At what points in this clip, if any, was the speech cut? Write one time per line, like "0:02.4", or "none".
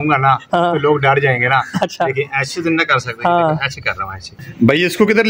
0:04.3